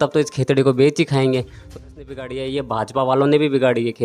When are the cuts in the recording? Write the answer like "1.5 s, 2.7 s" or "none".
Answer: 1.8 s